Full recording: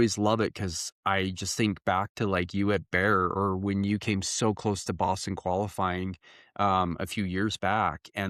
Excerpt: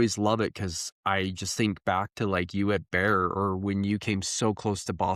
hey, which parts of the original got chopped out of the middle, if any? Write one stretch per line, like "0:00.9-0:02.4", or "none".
none